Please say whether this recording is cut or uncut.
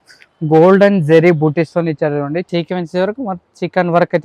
cut